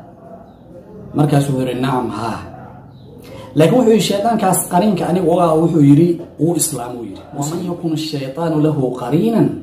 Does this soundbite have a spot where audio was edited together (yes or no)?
yes